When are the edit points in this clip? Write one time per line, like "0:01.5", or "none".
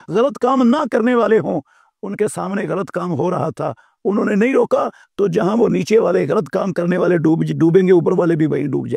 none